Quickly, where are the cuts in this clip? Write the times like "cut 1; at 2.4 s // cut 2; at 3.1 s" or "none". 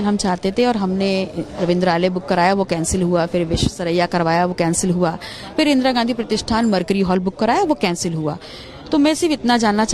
none